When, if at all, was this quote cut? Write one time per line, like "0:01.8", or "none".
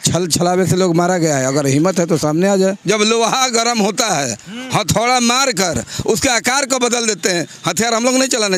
0:02.8

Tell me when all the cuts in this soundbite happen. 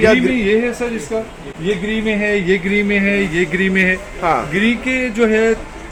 none

